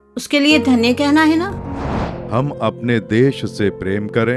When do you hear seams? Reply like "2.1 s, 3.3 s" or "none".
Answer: 2.0 s